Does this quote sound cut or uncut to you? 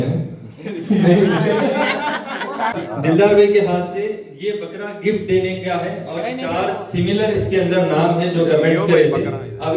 cut